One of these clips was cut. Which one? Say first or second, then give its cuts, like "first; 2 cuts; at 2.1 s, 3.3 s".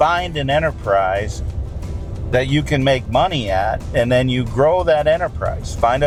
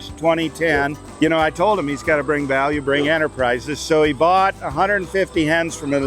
second; 1 cut; at 1.0 s